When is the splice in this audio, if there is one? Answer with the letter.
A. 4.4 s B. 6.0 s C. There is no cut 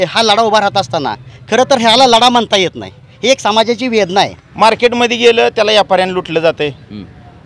A